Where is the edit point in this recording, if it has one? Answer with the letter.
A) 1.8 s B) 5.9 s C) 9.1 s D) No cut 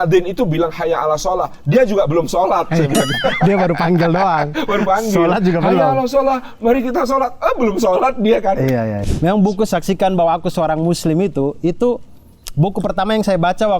C